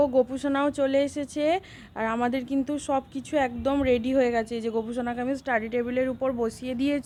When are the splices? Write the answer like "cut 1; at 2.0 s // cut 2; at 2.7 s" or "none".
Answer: none

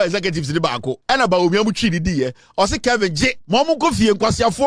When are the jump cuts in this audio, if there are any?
cut 1; at 0.9 s // cut 2; at 3.4 s

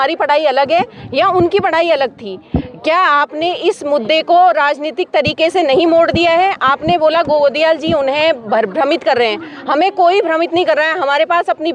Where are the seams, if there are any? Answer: none

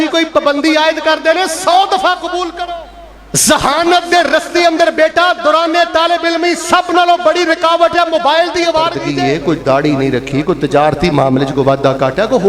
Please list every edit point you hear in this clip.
cut 1; at 2.6 s // cut 2; at 9.0 s

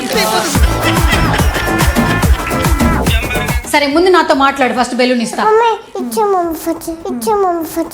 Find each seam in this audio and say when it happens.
cut 1; at 3.6 s

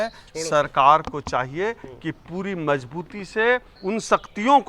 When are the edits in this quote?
cut 1; at 3.7 s

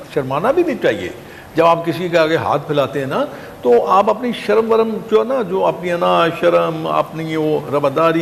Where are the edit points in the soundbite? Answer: none

